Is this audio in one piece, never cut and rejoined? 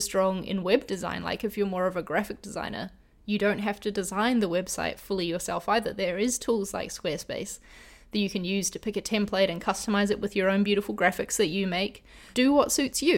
no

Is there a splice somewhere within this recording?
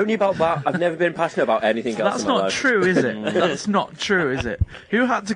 no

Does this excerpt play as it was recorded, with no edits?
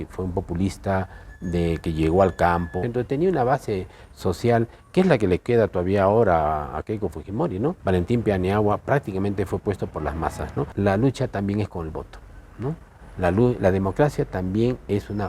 no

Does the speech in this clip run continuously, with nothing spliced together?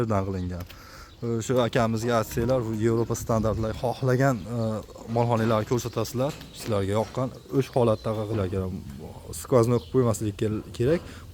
no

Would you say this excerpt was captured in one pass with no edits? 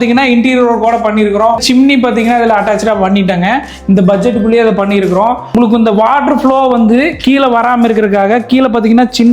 no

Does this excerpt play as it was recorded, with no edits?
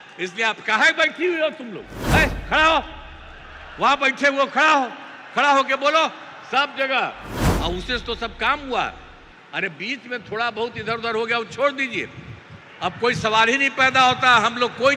no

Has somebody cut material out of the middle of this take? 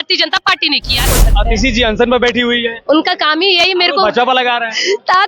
yes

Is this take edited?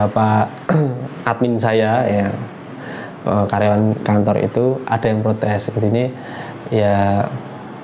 no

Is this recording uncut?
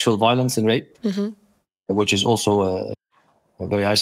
yes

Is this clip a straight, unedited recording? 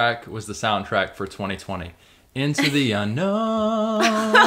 yes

